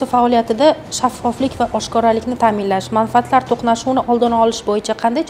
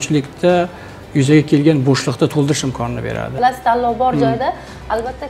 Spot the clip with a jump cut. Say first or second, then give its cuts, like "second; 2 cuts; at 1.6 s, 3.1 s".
second; 1 cut; at 3.3 s